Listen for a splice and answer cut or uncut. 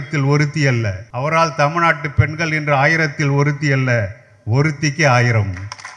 cut